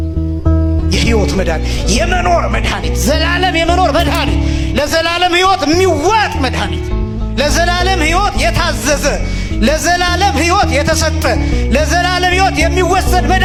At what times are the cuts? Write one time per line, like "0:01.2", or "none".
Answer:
none

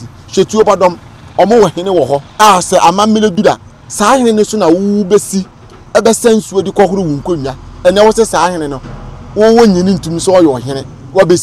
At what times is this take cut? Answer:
0:02.3

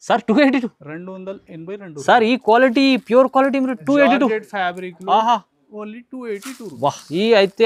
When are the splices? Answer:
none

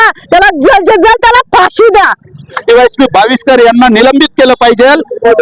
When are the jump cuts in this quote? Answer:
0:02.6

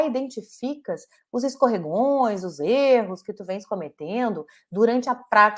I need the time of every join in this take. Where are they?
none

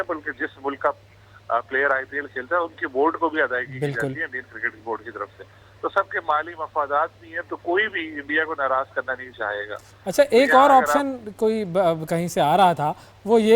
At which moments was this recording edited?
none

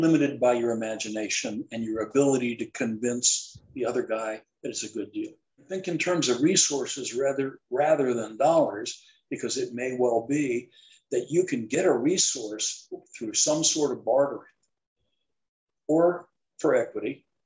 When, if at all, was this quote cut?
0:05.8

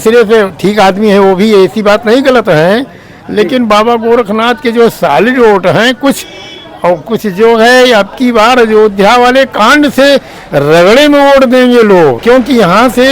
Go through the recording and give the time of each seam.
0:12.2

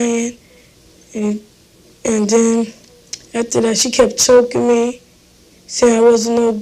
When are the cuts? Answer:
0:02.0

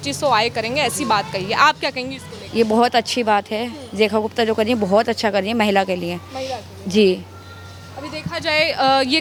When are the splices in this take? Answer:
none

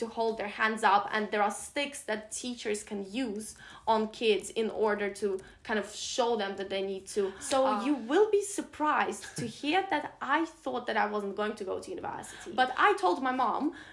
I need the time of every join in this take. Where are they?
0:07.4
0:12.3

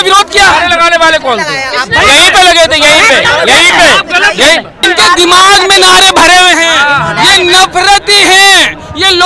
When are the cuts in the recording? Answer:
0:04.8

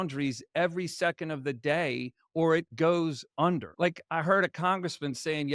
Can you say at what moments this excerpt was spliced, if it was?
none

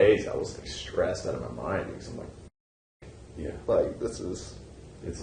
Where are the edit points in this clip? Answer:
none

